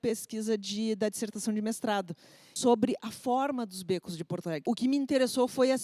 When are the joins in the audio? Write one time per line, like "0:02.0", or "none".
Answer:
0:02.5
0:04.6